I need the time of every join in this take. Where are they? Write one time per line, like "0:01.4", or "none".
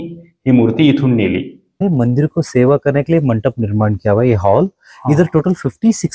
0:01.8